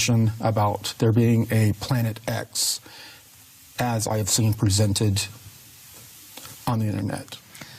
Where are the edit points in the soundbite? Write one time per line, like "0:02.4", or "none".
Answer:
0:01.5